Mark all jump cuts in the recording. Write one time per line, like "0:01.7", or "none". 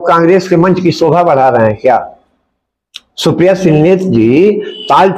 none